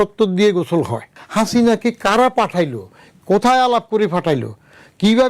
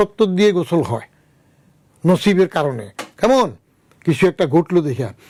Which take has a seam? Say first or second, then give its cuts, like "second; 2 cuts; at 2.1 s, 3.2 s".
first; 1 cut; at 1.2 s